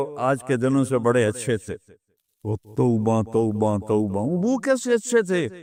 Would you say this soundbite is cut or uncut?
uncut